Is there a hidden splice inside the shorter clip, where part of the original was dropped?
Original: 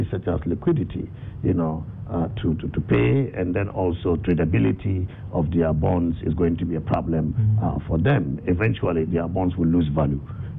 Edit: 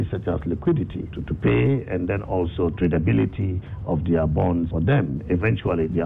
yes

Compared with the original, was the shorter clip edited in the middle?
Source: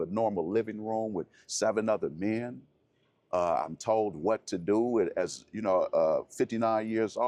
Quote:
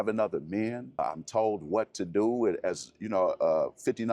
yes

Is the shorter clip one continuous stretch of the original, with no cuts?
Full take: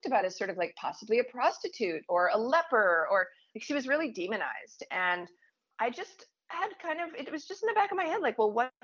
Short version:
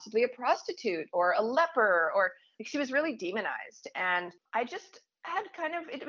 no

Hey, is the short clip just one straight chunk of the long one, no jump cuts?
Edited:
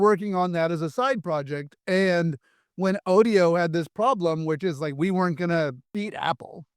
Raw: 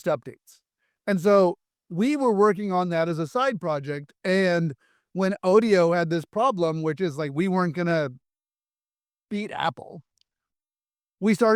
no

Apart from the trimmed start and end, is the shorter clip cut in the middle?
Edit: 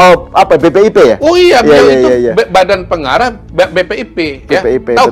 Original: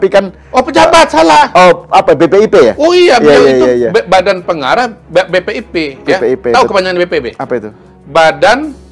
no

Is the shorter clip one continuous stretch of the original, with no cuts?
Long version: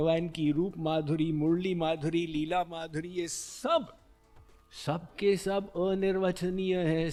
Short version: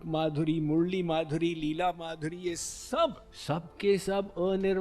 no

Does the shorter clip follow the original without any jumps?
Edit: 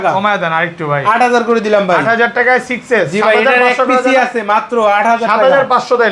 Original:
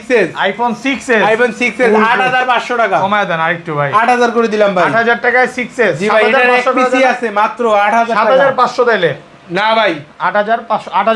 yes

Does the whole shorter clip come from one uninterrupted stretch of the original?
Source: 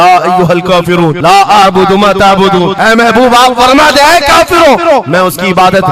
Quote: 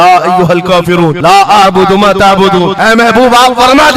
yes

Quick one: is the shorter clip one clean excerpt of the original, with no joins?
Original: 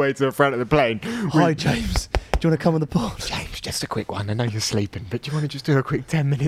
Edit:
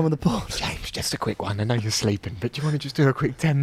yes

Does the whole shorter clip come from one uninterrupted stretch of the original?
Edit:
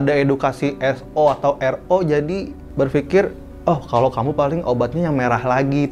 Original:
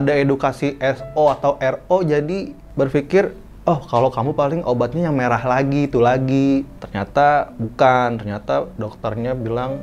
yes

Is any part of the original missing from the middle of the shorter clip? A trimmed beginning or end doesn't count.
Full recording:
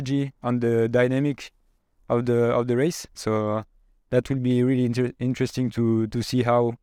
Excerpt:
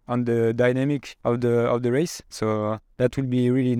yes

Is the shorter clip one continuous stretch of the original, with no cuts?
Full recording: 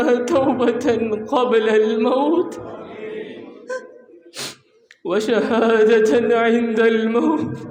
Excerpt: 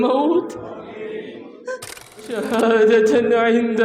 no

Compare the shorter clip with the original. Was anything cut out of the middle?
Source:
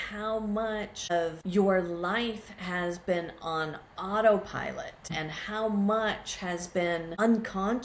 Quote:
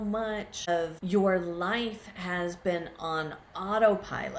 no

